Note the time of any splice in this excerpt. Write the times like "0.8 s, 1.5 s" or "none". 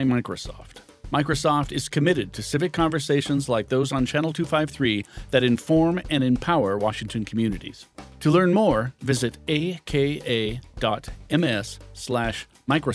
none